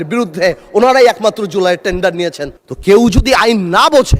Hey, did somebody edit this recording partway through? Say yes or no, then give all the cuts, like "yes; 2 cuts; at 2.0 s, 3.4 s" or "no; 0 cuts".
yes; 1 cut; at 2.5 s